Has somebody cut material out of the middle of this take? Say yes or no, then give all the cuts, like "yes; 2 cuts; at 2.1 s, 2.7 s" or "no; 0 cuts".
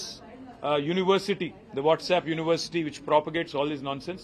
no; 0 cuts